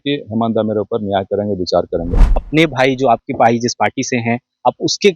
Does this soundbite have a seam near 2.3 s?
yes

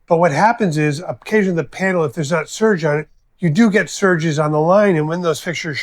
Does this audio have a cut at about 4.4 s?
no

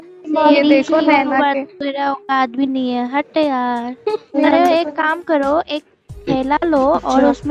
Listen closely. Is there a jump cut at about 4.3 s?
yes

